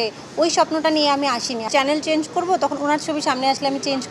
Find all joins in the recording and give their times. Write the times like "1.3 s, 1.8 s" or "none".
1.7 s